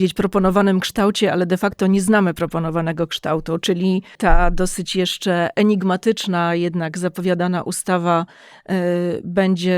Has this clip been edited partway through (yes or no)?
yes